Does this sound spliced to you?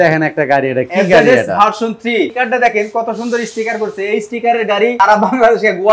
yes; 2 cuts; at 2.3 s, 4.9 s

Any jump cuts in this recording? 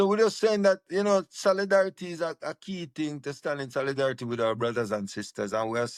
no; 0 cuts

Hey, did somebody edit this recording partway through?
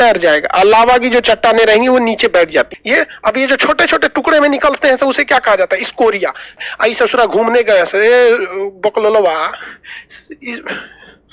yes; 2 cuts; at 2.8 s, 6.6 s

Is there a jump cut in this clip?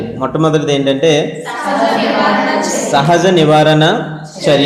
no; 0 cuts

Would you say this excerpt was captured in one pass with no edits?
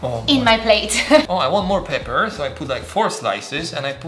no; 1 cut; at 1.2 s

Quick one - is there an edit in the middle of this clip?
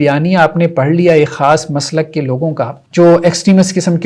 yes; 1 cut; at 2.8 s

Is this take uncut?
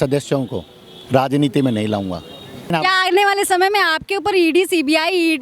no; 1 cut; at 2.7 s

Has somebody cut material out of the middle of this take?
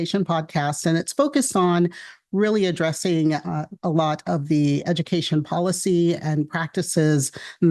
no; 0 cuts

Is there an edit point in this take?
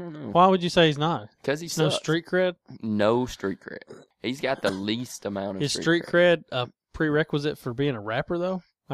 no; 0 cuts

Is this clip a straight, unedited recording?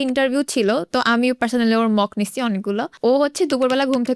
yes; 0 cuts

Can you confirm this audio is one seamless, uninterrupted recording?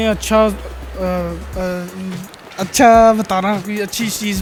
yes; 0 cuts

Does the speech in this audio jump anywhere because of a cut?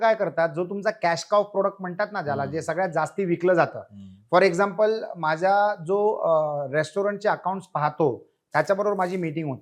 no; 0 cuts

